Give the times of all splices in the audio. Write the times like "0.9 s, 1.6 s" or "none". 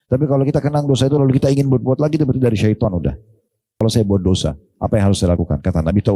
3.8 s